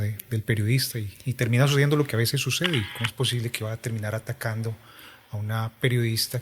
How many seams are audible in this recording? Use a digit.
1